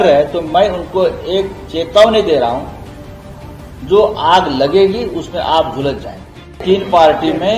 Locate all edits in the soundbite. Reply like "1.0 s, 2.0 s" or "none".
6.6 s